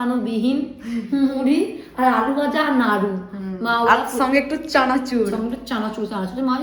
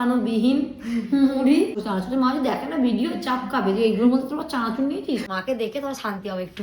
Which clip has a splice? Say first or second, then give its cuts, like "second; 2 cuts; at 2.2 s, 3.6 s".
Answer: second; 2 cuts; at 1.8 s, 5.2 s